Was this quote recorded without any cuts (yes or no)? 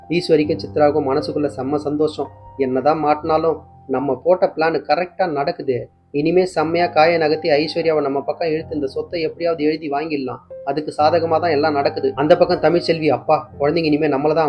no